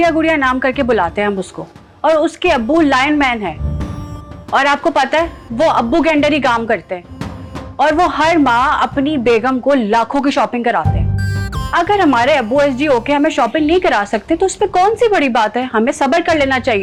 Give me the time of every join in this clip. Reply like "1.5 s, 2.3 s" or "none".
none